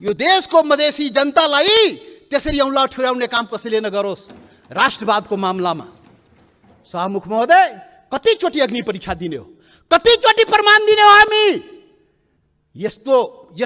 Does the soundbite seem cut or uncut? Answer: uncut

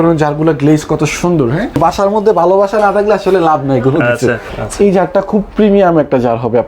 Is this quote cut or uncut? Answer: cut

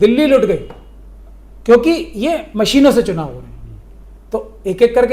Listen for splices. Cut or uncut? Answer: uncut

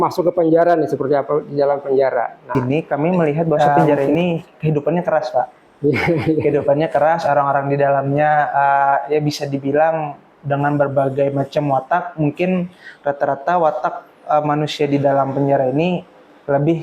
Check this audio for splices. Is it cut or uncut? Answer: cut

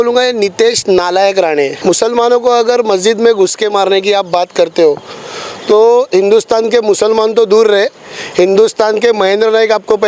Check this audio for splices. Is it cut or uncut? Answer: cut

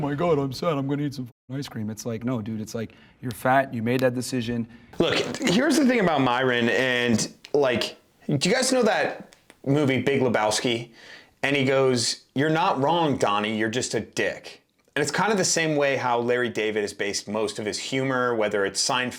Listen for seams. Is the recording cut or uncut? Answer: uncut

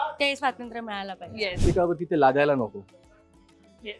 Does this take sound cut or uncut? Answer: cut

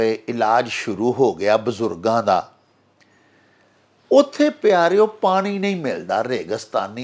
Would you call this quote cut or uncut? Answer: uncut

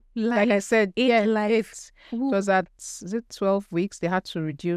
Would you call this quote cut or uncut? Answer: uncut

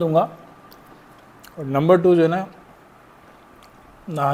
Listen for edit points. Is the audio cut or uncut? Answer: uncut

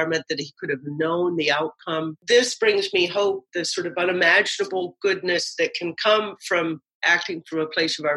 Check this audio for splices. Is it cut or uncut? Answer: cut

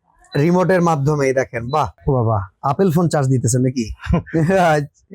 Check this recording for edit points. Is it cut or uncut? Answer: cut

